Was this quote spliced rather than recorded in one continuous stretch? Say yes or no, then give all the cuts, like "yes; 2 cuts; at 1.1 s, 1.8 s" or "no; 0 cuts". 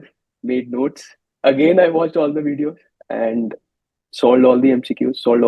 yes; 1 cut; at 2.9 s